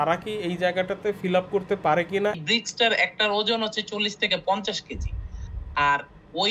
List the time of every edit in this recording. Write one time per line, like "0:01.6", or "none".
0:02.4